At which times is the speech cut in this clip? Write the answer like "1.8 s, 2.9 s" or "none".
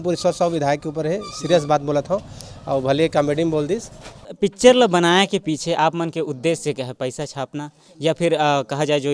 4.3 s